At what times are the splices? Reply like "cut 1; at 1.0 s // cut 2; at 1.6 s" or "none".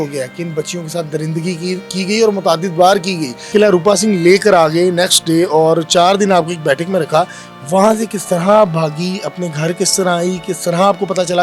cut 1; at 3.5 s